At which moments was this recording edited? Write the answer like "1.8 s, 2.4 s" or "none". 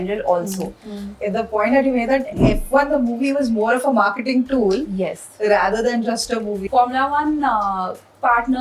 1.2 s, 6.6 s